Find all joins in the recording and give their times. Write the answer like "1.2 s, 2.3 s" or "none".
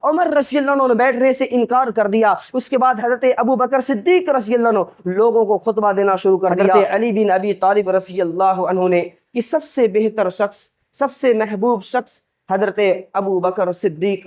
6.7 s